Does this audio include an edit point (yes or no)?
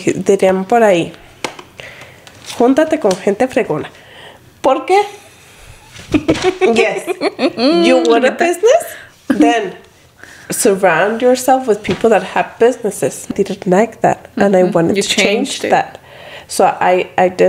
yes